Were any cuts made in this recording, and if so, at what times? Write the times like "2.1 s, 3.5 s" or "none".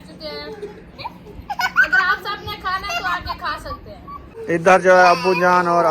4.3 s